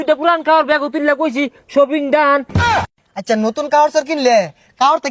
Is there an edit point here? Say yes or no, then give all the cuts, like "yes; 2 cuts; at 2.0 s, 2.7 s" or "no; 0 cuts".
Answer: yes; 1 cut; at 2.7 s